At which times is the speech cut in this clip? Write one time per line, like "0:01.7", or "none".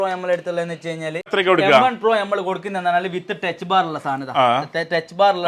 none